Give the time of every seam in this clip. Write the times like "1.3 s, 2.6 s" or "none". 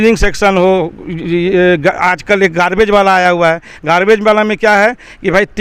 none